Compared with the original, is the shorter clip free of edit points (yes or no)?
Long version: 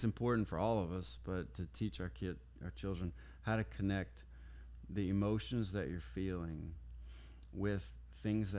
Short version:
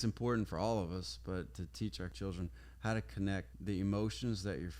no